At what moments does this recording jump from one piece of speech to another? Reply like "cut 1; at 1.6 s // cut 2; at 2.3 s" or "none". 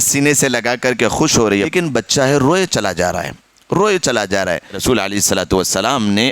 cut 1; at 1.7 s // cut 2; at 4.8 s